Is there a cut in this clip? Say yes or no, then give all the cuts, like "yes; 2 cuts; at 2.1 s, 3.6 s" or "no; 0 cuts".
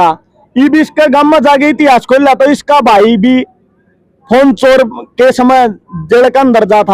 no; 0 cuts